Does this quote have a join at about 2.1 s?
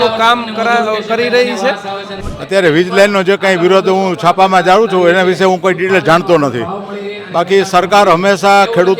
yes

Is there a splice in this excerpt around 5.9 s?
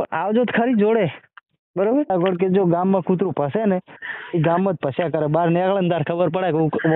no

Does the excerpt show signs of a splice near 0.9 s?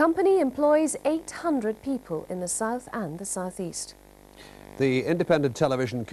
no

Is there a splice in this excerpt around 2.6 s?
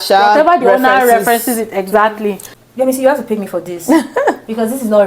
yes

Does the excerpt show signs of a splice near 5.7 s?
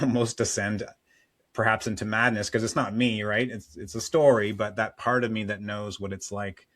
no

